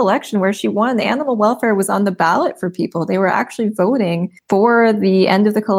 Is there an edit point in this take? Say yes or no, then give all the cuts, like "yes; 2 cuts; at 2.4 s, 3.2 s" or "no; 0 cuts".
yes; 1 cut; at 4.3 s